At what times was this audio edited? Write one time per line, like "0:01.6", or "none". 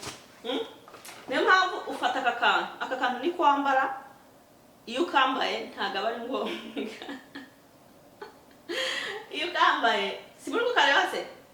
none